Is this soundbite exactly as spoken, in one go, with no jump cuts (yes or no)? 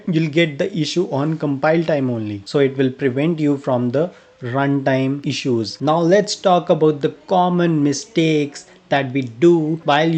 no